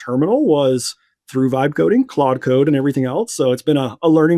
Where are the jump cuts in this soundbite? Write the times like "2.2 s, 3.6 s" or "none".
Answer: none